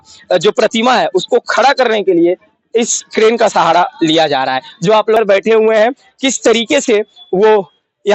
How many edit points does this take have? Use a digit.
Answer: 1